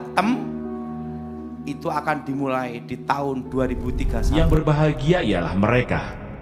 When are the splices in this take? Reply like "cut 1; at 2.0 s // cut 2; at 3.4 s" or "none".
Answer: cut 1; at 4.3 s

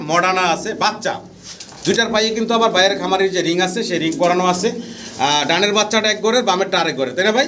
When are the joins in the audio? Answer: none

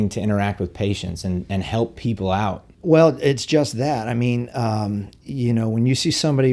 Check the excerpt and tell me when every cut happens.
none

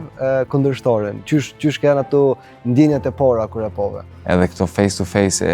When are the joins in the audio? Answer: cut 1; at 4.1 s

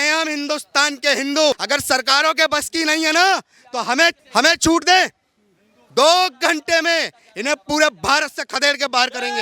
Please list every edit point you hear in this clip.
cut 1; at 1.6 s // cut 2; at 4.2 s

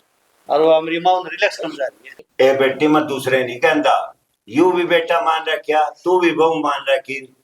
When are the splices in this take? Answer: cut 1; at 2.1 s

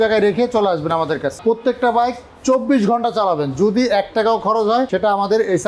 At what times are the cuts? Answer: cut 1; at 1.4 s // cut 2; at 4.9 s

